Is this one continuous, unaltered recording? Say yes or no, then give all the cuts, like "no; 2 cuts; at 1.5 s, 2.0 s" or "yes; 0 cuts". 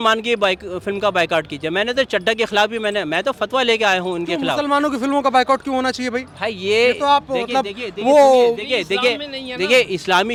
yes; 0 cuts